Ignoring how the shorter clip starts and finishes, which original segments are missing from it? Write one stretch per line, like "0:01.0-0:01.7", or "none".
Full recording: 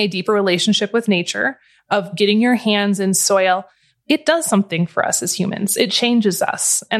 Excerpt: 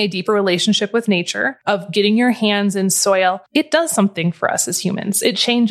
0:01.5-0:01.7
0:03.7-0:04.0

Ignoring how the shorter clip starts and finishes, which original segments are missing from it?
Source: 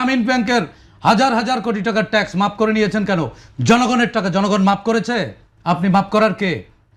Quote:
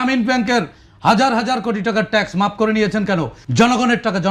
0:03.4-0:03.5

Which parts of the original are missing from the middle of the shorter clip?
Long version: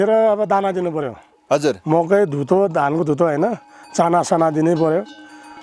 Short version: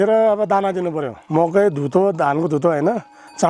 0:01.2-0:01.8

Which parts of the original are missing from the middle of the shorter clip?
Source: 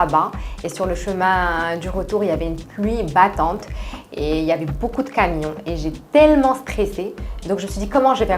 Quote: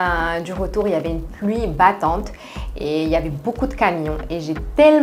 none

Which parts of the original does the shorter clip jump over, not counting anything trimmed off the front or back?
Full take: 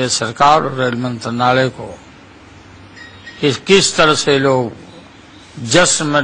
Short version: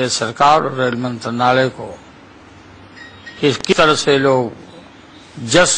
0:03.7-0:03.9

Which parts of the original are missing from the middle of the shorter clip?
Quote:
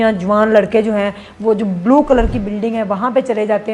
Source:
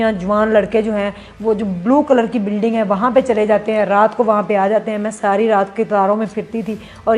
none

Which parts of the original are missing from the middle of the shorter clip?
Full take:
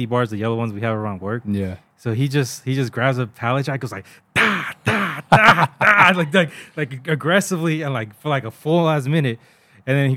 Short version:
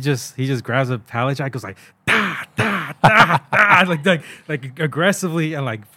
none

